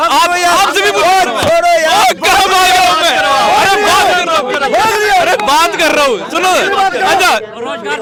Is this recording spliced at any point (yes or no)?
no